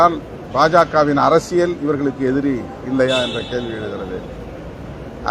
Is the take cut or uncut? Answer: uncut